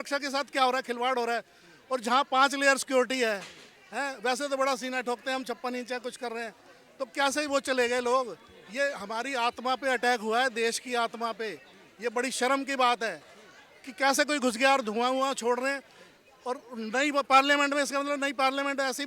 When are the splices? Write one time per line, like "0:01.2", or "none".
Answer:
none